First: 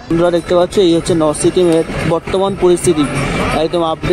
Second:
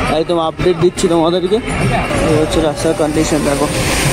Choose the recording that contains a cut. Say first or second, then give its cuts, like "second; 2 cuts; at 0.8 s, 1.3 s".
second; 1 cut; at 2.0 s